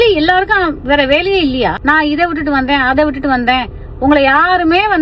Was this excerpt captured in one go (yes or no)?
no